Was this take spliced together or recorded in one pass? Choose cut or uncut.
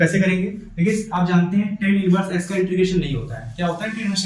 uncut